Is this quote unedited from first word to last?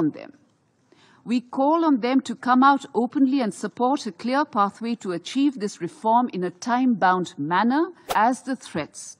no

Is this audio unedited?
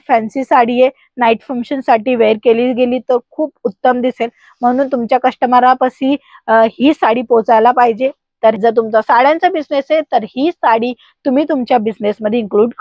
no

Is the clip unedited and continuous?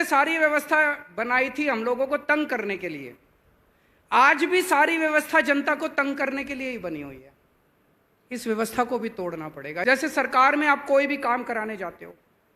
no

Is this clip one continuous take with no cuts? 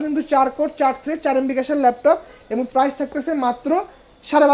yes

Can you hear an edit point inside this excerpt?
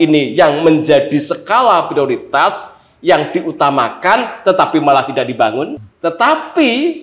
yes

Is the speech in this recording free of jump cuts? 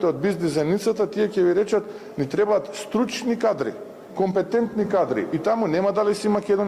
yes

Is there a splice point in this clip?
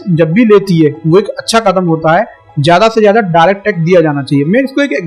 no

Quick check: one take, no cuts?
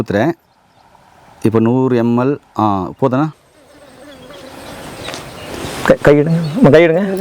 no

